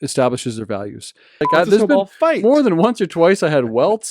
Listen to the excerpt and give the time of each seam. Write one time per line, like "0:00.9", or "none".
0:01.5